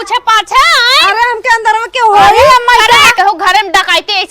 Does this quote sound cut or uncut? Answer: cut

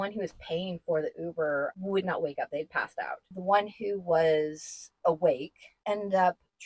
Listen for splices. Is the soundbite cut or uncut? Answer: cut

